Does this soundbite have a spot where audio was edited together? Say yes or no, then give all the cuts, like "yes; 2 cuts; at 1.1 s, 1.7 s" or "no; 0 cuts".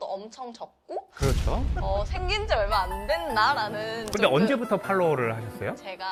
no; 0 cuts